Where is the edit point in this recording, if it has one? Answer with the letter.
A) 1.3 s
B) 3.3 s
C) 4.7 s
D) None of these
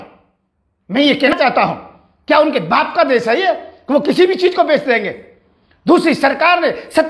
A